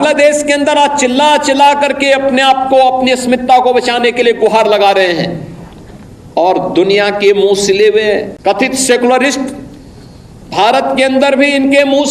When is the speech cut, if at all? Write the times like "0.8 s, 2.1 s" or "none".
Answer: 8.3 s